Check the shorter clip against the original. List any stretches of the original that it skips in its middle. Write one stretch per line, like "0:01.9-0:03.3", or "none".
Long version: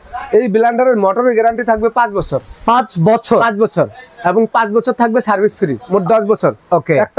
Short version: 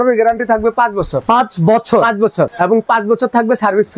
0:02.3-0:02.5
0:03.9-0:04.2

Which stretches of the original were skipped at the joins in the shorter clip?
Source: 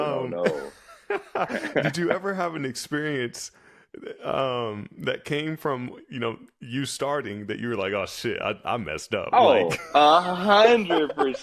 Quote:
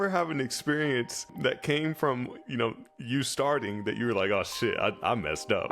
0:03.5-0:04.9

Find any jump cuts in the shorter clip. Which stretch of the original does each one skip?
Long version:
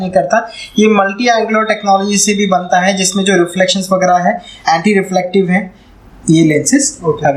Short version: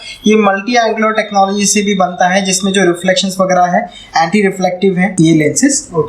0:05.6-0:06.2

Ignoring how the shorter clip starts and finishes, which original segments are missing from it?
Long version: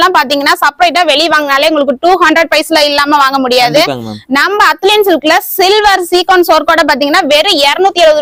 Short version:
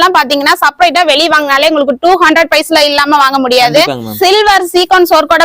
0:04.1-0:05.5

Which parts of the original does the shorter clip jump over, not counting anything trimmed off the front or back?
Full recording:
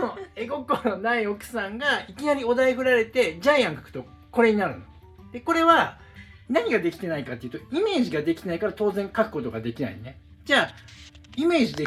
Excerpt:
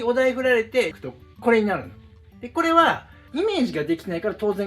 0:03.4-0:03.9
0:06.1-0:07.5

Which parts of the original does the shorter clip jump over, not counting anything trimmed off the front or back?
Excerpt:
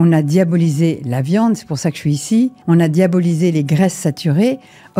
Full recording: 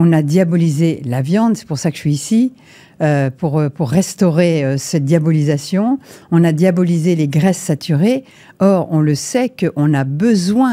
0:02.6-0:06.2

